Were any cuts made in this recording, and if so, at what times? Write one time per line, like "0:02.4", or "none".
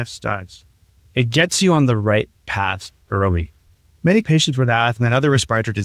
0:04.1